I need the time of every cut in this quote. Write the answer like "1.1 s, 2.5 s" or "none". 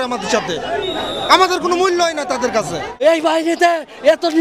3.0 s